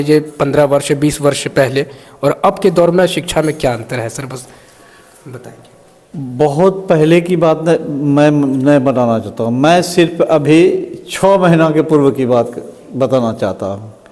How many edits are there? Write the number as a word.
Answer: zero